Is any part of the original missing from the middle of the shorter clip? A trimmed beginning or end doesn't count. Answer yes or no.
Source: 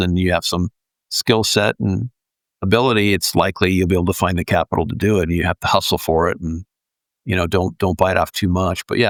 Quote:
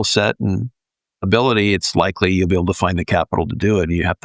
no